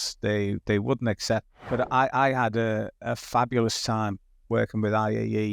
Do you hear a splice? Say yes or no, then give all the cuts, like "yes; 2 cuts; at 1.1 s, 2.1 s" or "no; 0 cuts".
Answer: yes; 1 cut; at 1.6 s